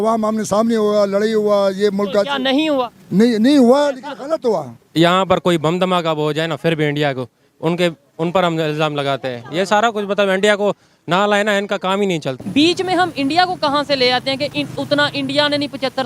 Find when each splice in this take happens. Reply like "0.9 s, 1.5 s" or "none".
4.8 s, 12.3 s